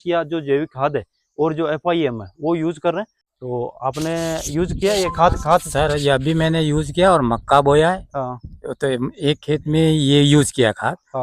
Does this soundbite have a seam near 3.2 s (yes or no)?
yes